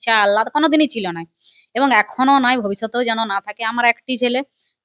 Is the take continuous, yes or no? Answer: yes